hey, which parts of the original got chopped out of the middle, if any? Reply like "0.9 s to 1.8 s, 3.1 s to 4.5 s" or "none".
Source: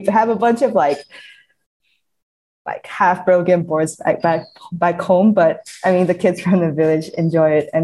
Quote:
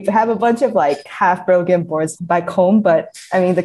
1.1 s to 2.9 s, 3.9 s to 4.7 s